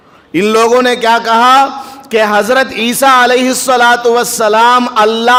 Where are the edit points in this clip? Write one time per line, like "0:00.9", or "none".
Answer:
none